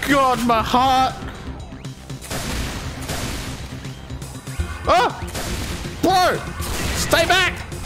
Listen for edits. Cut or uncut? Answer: uncut